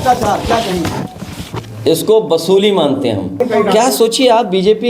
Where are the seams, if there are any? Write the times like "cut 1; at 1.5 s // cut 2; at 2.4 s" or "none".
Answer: cut 1; at 3.4 s